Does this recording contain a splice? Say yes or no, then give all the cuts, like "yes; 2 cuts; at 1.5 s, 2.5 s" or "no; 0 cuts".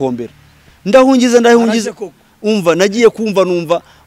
no; 0 cuts